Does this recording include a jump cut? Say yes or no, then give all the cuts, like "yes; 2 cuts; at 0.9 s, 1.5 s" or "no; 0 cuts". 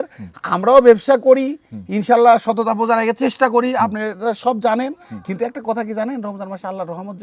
no; 0 cuts